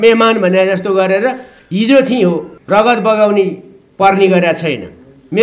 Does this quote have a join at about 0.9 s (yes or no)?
no